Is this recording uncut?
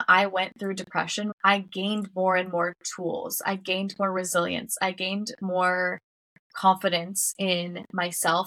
no; 1 cut; at 1.3 s

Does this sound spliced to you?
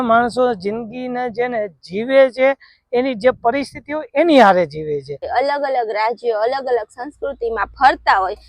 yes; 1 cut; at 5.3 s

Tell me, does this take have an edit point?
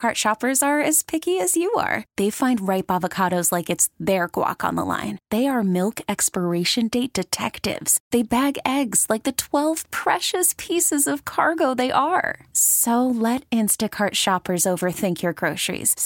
no; 0 cuts

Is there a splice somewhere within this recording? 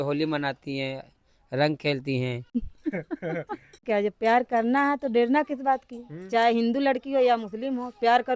yes; 2 cuts; at 2.6 s, 3.8 s

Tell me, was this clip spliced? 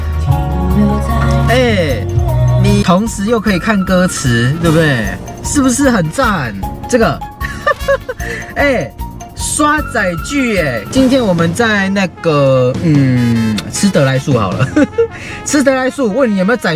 yes; 3 cuts; at 2.8 s, 6.6 s, 10.8 s

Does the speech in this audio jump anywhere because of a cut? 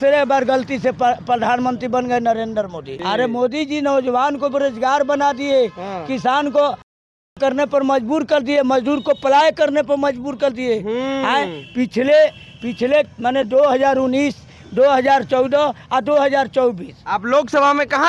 no; 0 cuts

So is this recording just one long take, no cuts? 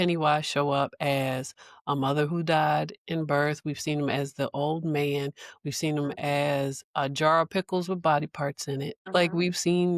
no; 1 cut; at 9.0 s

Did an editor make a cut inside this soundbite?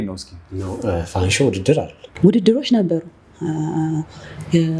yes; 1 cut; at 2.0 s

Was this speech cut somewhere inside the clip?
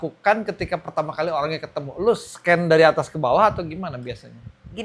no; 0 cuts

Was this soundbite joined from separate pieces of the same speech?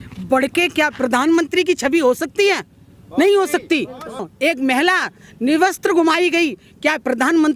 yes; 1 cut; at 4.3 s

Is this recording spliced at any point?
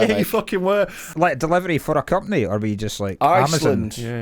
yes; 1 cut; at 1.0 s

